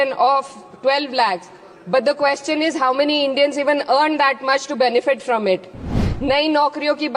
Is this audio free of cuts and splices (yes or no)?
no